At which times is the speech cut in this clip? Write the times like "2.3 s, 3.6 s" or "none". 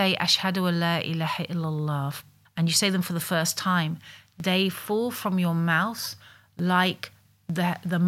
2.3 s